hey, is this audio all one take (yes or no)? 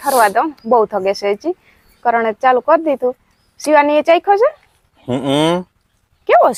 yes